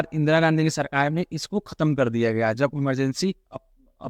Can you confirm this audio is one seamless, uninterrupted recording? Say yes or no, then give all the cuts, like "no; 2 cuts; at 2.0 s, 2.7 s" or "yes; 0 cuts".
yes; 0 cuts